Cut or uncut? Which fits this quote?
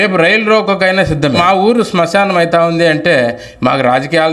cut